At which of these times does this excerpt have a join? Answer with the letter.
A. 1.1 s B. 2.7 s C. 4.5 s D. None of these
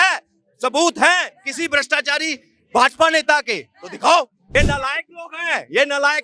C